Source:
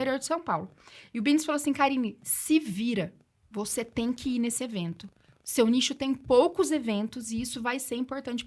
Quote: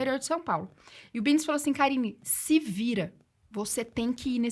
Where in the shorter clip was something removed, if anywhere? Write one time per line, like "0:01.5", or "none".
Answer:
none

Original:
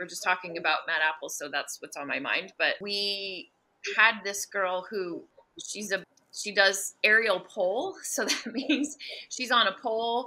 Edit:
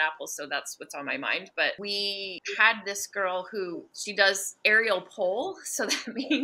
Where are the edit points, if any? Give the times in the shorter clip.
0:02.4
0:04.0

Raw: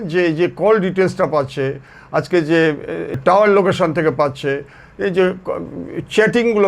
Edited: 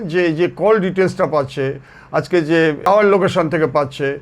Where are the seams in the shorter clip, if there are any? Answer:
0:02.9

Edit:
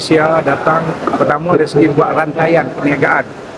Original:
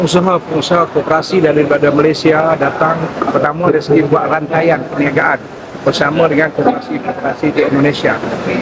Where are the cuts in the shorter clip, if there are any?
none

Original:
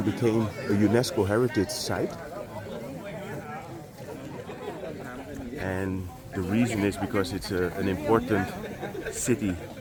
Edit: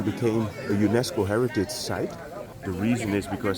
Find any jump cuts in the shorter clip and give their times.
0:02.5

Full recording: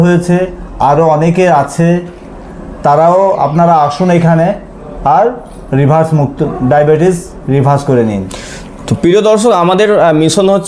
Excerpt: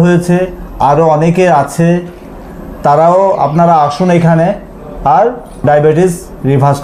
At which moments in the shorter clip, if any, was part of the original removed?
0:05.6

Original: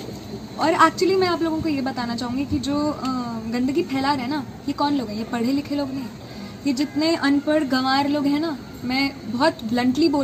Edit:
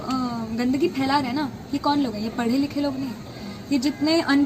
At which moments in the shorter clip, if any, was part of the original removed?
none

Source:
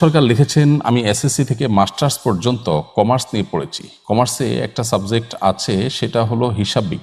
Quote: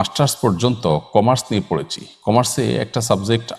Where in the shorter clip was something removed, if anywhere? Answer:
none

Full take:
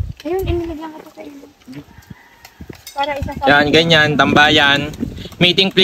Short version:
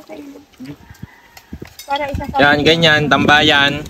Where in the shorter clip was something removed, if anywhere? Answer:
none

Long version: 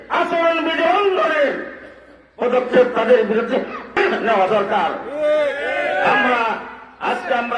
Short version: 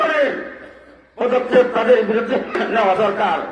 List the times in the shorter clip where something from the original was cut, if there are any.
0:02.6

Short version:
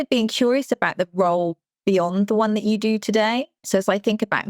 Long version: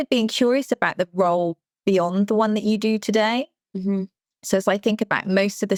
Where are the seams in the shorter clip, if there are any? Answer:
0:03.6

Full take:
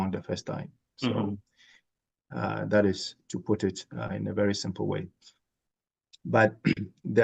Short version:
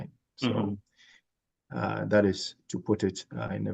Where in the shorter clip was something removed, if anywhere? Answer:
none

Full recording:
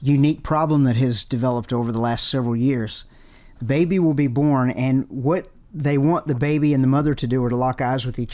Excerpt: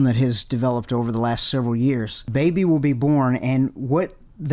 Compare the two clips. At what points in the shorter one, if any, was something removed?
0:02.2

